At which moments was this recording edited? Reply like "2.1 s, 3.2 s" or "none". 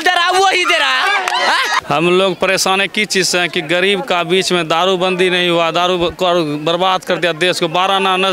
none